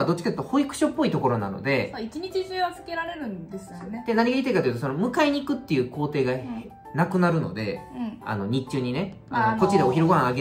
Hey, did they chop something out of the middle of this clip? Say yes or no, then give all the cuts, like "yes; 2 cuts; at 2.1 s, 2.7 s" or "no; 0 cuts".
no; 0 cuts